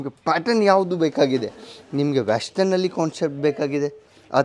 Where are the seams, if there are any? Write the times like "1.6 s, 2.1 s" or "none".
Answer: none